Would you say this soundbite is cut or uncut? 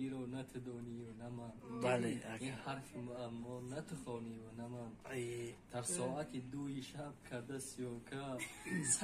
uncut